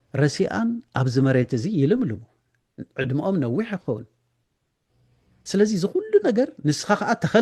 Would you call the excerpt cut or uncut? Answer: uncut